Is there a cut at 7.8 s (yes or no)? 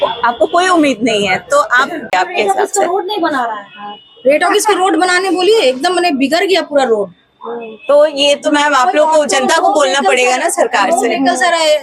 no